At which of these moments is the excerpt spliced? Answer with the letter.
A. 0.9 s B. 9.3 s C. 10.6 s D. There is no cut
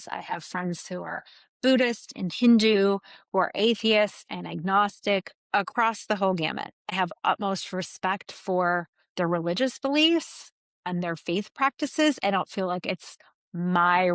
D